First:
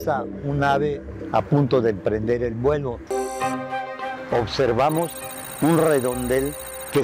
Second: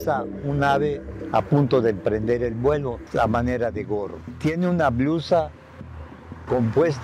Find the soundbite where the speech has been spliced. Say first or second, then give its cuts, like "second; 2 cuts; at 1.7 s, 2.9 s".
first; 1 cut; at 3.0 s